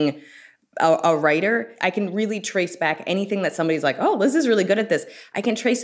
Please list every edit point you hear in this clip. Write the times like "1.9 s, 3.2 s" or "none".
1.7 s